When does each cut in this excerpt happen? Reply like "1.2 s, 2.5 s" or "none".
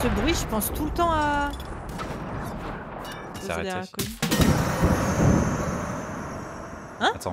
3.3 s